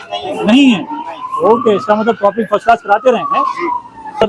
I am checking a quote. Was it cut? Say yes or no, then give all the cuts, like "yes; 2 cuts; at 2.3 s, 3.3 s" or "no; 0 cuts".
no; 0 cuts